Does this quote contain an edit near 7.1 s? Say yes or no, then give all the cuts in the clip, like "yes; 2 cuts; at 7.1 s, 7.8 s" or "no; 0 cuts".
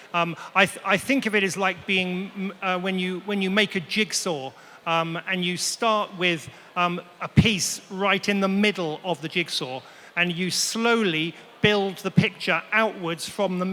no; 0 cuts